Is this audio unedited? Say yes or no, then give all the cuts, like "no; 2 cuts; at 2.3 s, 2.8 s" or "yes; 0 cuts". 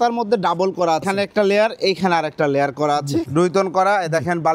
no; 2 cuts; at 1.0 s, 3.3 s